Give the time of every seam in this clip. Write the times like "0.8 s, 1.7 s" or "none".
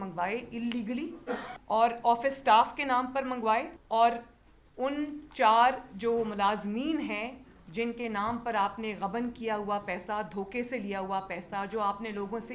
1.5 s, 3.8 s